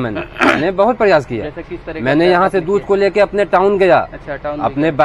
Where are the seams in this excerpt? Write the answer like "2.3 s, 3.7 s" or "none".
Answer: none